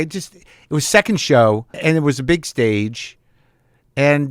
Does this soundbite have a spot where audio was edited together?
yes; 1 cut; at 1.7 s

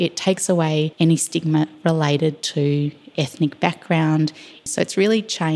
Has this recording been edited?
yes; 2 cuts; at 0.9 s, 4.7 s

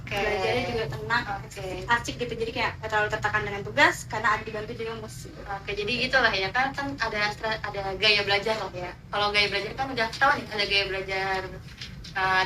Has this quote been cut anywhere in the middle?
no; 0 cuts

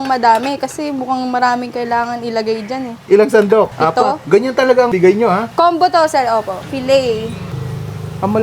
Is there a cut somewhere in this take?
yes; 3 cuts; at 3.7 s, 5.1 s, 6.7 s

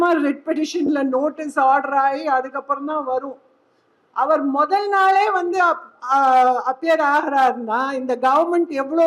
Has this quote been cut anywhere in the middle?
no; 0 cuts

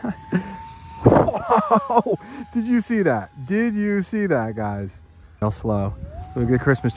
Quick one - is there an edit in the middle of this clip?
yes; 1 cut; at 5.4 s

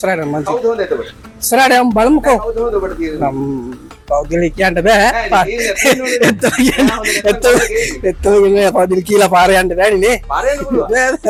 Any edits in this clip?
no; 0 cuts

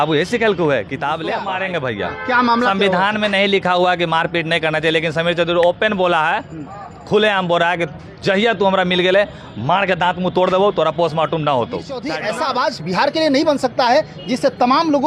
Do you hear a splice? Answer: yes; 2 cuts; at 1.5 s, 12.1 s

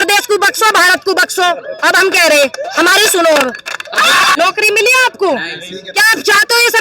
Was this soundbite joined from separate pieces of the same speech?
yes; 1 cut; at 4.3 s

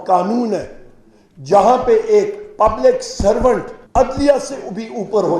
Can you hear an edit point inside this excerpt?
yes; 1 cut; at 3.8 s

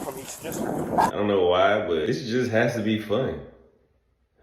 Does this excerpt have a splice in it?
yes; 1 cut; at 2.1 s

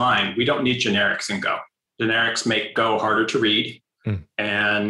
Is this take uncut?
no; 1 cut; at 1.8 s

